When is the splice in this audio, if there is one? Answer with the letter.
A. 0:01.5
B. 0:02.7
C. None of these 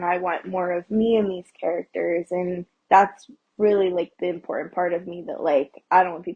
B